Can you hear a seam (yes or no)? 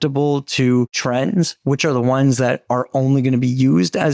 yes